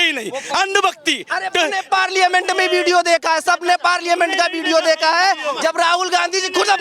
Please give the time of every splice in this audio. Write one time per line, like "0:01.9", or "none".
0:01.8